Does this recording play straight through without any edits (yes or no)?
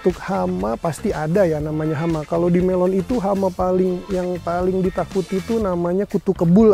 yes